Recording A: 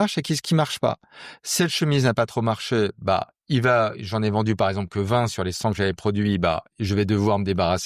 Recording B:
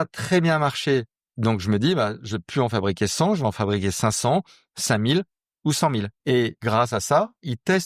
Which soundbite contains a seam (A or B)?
B